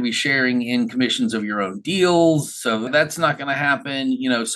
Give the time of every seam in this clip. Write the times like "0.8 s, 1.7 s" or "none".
2.9 s